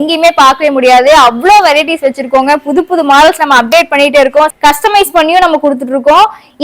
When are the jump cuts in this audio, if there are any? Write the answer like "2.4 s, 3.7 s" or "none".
4.5 s

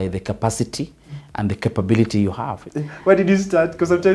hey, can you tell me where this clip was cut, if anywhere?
2.6 s

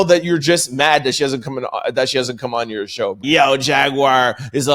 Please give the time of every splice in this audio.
3.2 s

